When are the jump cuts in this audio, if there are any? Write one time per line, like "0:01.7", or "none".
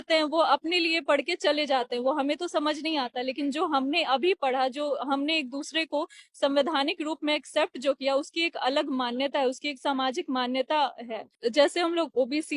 0:11.3